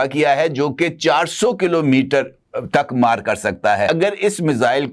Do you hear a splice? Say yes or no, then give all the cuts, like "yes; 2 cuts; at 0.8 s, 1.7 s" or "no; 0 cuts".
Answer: yes; 1 cut; at 3.9 s